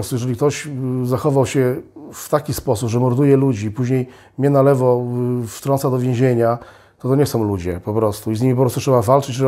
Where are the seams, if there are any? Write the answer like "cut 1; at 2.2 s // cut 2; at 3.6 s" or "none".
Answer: none